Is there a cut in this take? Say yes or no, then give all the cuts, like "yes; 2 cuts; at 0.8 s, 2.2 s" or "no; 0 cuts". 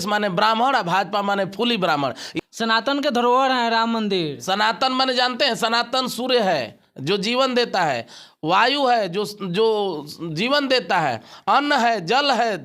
yes; 1 cut; at 2.3 s